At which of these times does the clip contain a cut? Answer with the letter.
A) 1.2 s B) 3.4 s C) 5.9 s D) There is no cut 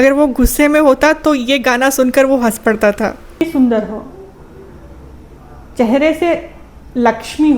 B